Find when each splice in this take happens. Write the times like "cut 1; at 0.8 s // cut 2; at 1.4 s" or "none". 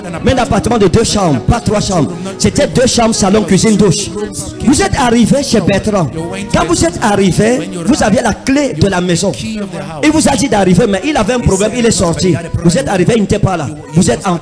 none